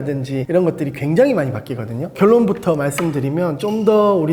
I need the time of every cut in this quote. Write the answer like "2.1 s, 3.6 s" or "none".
none